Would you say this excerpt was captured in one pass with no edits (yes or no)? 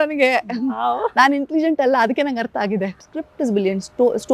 no